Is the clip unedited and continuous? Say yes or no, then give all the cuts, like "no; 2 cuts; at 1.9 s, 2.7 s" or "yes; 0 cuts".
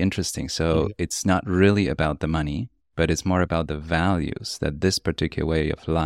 yes; 0 cuts